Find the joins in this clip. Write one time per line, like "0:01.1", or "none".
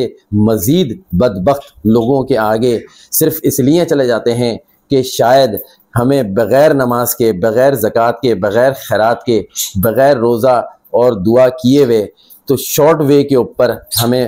none